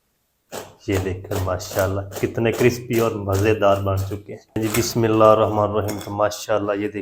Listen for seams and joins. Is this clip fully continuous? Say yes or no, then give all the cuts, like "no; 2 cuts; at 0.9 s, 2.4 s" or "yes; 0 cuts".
no; 1 cut; at 4.6 s